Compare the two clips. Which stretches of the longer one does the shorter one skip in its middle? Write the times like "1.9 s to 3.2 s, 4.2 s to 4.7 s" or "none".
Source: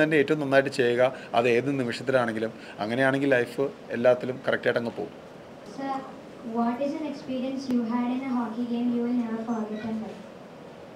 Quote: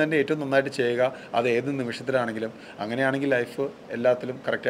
none